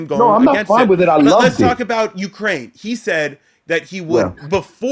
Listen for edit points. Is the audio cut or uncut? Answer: uncut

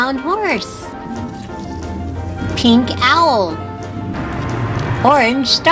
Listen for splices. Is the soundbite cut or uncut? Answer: cut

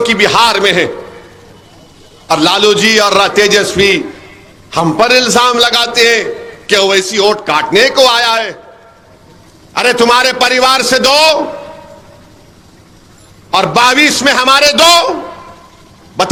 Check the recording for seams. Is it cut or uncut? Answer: uncut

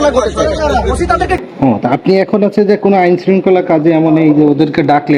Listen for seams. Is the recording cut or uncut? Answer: cut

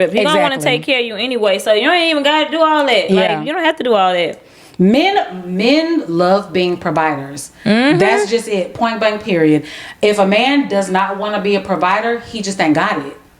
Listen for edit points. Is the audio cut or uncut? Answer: uncut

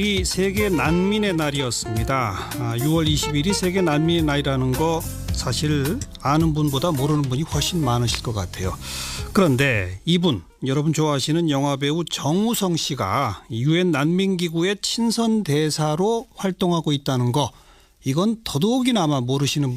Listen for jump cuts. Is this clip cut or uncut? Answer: uncut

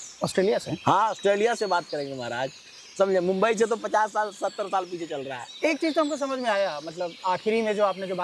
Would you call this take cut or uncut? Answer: uncut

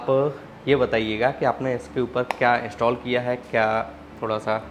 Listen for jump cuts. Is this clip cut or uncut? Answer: uncut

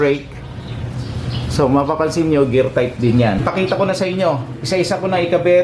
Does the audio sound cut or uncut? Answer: cut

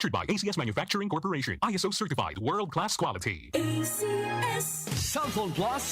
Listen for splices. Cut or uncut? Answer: cut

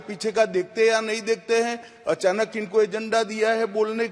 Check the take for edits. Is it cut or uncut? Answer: uncut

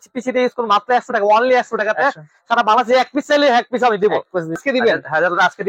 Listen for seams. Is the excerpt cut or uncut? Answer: cut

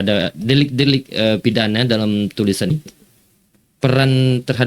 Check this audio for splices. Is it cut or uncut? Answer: cut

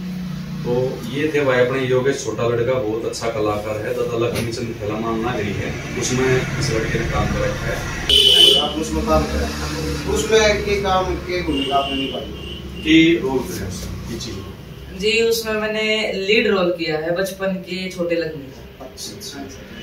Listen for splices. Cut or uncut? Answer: cut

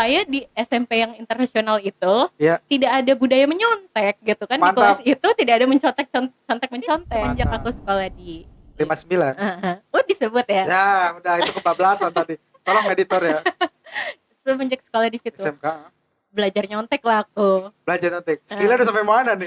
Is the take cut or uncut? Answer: cut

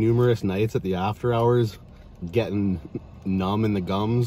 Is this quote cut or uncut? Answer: uncut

